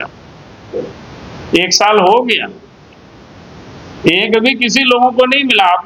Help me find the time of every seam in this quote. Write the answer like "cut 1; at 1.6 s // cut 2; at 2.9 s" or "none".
none